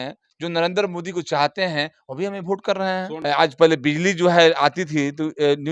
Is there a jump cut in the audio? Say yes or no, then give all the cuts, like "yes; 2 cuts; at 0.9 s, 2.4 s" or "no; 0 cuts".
yes; 1 cut; at 3.1 s